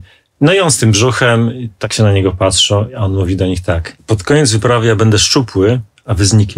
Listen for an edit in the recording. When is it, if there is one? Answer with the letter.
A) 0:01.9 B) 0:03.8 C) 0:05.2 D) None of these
A